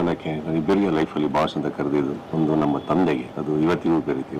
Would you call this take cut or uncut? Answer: cut